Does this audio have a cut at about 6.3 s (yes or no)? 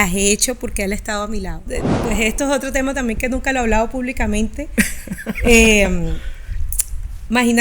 no